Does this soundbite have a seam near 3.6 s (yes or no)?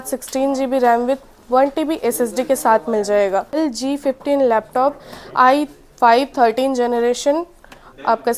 yes